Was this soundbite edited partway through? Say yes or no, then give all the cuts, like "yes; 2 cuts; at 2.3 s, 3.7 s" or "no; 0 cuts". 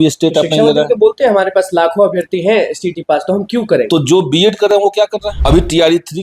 yes; 1 cut; at 4.8 s